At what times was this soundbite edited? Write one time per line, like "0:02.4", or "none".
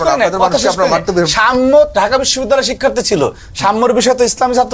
none